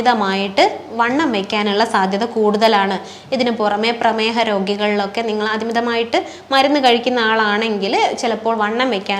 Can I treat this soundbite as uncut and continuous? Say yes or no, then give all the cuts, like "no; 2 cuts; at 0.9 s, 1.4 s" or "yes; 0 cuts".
yes; 0 cuts